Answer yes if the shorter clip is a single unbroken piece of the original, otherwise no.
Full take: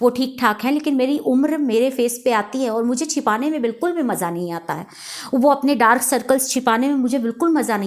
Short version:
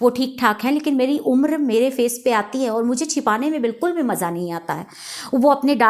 yes